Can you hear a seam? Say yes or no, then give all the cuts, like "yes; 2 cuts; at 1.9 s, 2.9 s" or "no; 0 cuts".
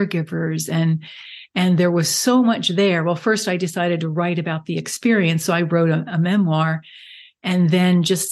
no; 0 cuts